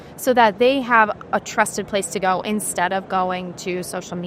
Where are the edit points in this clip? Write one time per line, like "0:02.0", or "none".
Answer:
none